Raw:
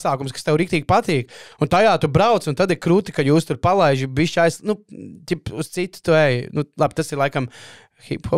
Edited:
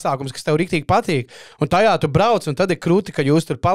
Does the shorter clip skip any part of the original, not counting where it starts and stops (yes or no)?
no